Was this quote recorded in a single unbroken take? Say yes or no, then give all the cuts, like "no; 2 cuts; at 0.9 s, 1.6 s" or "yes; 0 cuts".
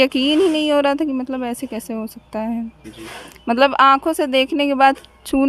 yes; 0 cuts